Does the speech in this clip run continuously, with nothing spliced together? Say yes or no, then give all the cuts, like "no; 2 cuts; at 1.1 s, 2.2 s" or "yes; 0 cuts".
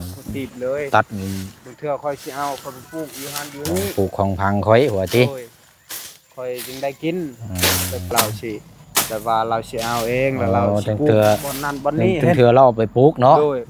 no; 1 cut; at 8.1 s